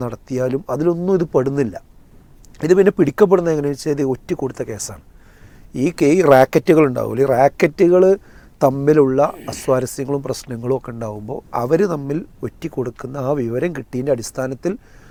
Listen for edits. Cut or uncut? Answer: uncut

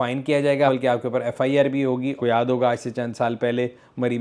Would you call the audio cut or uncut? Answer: cut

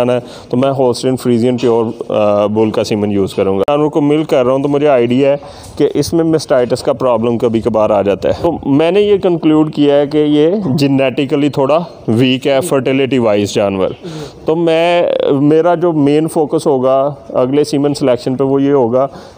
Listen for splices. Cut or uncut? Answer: cut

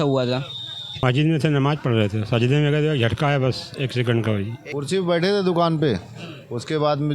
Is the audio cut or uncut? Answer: cut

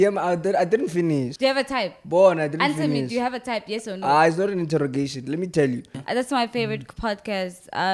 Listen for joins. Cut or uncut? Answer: cut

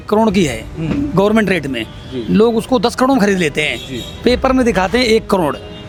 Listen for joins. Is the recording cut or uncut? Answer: uncut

